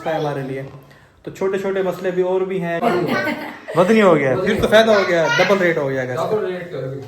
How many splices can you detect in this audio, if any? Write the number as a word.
one